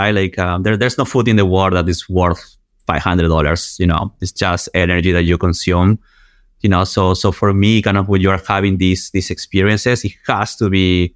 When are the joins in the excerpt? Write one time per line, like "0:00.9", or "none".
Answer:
none